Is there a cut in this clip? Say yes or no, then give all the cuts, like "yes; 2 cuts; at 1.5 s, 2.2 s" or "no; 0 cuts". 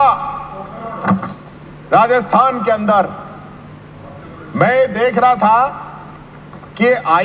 no; 0 cuts